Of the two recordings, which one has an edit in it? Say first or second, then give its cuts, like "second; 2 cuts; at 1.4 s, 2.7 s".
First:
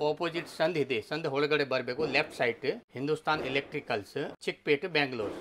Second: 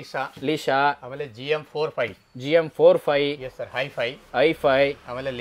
first; 2 cuts; at 2.9 s, 4.3 s